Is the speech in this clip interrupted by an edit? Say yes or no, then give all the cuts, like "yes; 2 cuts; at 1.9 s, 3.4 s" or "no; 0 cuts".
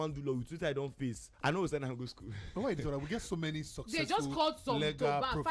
no; 0 cuts